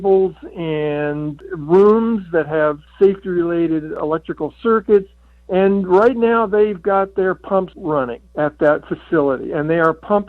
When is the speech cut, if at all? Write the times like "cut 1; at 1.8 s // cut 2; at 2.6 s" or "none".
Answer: cut 1; at 2.8 s // cut 2; at 3.9 s // cut 3; at 7.9 s